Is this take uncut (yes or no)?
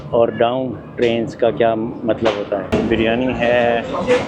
no